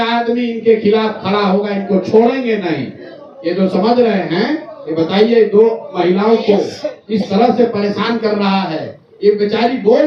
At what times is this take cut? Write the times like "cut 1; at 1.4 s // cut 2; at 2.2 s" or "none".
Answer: none

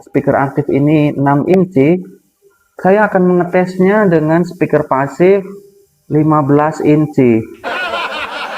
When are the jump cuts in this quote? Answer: cut 1; at 7.5 s

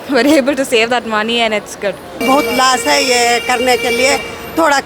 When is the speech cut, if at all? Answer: cut 1; at 2.0 s

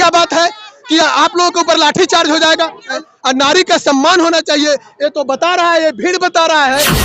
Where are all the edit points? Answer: cut 1; at 3.0 s

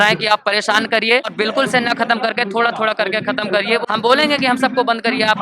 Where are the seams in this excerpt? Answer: cut 1; at 1.3 s // cut 2; at 3.8 s

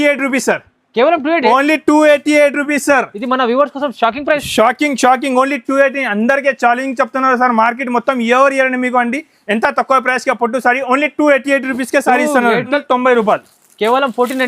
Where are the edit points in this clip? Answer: cut 1; at 12.7 s

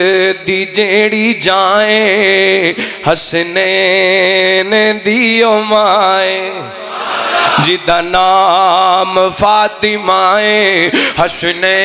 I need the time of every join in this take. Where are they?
none

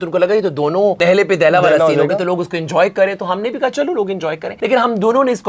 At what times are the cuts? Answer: cut 1; at 1.0 s // cut 2; at 4.5 s

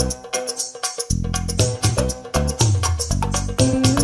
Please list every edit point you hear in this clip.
none

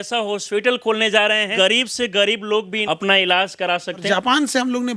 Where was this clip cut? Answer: cut 1; at 1.5 s // cut 2; at 2.8 s // cut 3; at 4.0 s

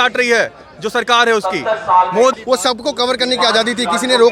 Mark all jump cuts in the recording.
cut 1; at 2.4 s

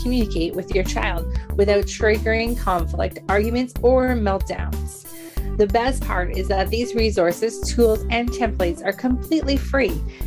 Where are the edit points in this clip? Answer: none

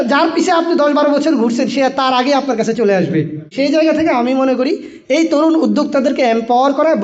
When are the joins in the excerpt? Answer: cut 1; at 3.5 s

